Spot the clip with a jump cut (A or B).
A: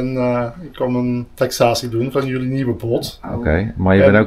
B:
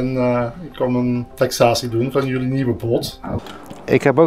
B